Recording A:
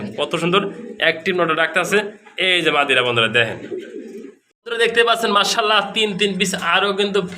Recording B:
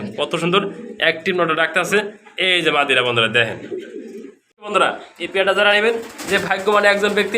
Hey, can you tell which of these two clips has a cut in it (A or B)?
B